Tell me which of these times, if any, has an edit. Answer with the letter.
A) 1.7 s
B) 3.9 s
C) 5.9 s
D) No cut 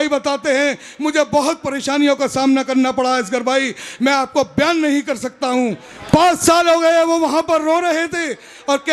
C